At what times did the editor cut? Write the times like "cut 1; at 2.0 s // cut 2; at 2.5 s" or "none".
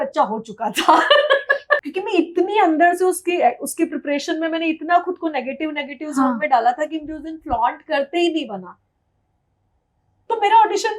cut 1; at 1.8 s